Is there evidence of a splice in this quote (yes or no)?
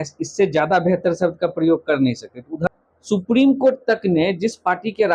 yes